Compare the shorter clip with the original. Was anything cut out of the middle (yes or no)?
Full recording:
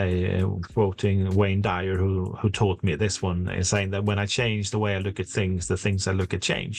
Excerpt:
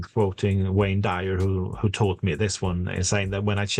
no